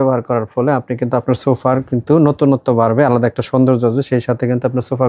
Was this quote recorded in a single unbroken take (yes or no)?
yes